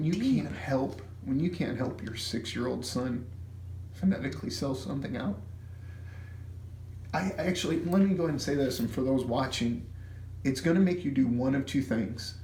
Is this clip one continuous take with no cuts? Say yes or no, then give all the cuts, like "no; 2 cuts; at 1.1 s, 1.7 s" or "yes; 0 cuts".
yes; 0 cuts